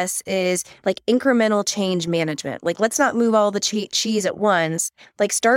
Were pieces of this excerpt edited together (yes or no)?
no